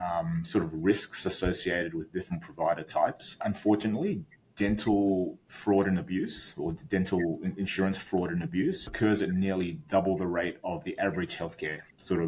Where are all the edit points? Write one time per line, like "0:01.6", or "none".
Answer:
0:03.3
0:08.9

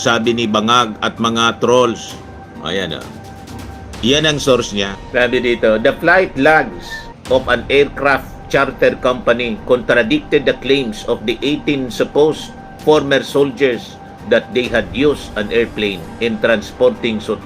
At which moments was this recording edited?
0:05.0

